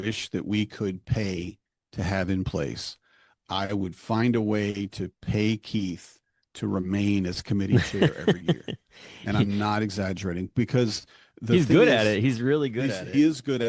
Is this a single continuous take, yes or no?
yes